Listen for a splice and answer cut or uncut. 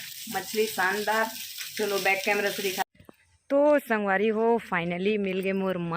cut